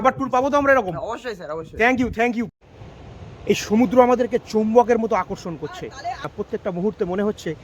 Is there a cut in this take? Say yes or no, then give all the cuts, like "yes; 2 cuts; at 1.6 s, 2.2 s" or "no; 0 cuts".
yes; 2 cuts; at 2.5 s, 6.3 s